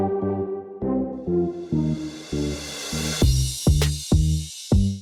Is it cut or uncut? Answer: uncut